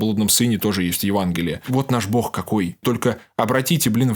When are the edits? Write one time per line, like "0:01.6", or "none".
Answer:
0:01.6
0:02.8